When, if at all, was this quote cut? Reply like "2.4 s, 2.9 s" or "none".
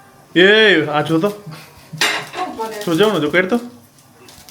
none